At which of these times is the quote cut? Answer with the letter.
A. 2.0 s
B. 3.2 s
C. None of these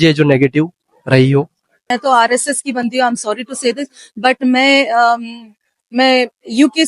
A